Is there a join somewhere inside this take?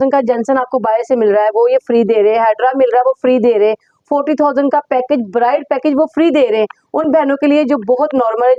no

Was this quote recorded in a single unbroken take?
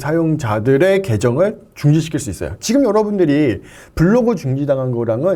yes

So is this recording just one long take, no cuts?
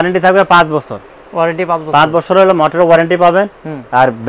yes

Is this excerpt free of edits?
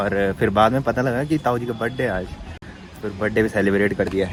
yes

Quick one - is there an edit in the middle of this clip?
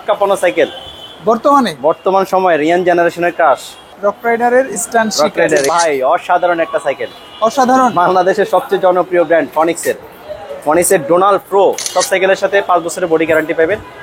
yes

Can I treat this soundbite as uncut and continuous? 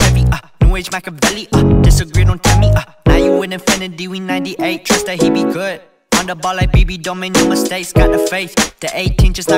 yes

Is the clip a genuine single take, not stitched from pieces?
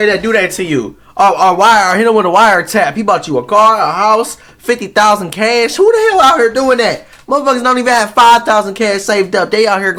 yes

